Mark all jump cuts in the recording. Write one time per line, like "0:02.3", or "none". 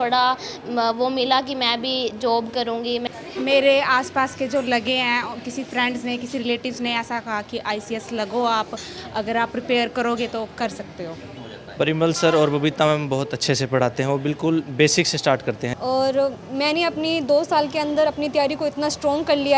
0:03.0
0:11.3
0:15.7